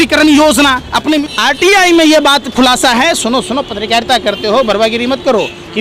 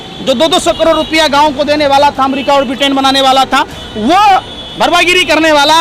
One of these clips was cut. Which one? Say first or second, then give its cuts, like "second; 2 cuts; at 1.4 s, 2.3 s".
first; 1 cut; at 1.2 s